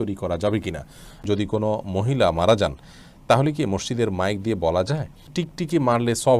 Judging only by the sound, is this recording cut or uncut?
cut